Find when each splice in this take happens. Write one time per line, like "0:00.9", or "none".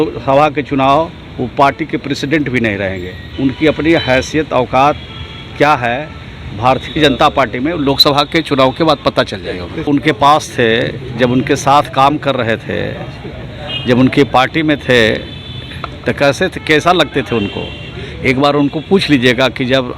0:03.2
0:09.9